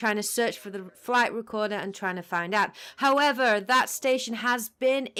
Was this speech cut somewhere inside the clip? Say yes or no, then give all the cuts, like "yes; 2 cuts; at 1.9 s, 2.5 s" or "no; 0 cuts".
no; 0 cuts